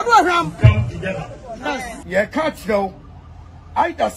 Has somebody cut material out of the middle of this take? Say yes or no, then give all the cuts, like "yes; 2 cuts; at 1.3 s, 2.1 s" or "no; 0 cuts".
yes; 1 cut; at 2.0 s